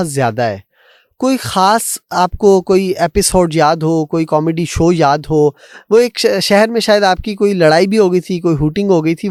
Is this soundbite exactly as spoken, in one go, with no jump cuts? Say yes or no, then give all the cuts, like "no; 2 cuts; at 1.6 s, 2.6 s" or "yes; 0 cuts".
yes; 0 cuts